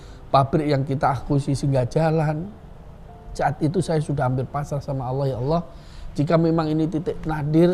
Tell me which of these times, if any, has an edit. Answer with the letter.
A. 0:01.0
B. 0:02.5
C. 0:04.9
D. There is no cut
D